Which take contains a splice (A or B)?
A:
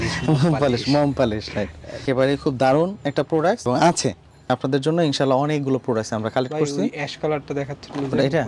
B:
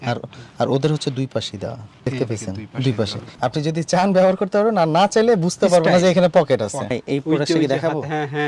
B